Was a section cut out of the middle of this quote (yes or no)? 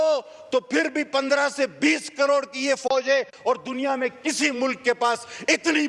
no